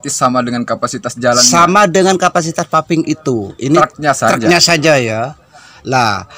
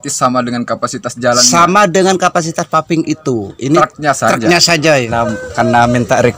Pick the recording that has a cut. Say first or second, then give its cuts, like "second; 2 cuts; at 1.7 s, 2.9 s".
second; 1 cut; at 5.1 s